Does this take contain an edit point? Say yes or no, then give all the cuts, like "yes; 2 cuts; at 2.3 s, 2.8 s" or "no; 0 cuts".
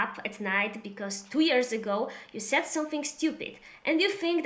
no; 0 cuts